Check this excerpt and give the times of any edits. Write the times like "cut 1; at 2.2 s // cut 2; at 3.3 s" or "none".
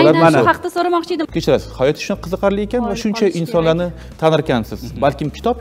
cut 1; at 1.3 s